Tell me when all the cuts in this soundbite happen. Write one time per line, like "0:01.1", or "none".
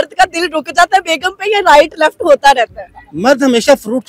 none